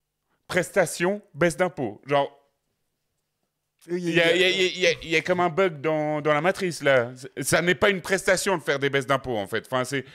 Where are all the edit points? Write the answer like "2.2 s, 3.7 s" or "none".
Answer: none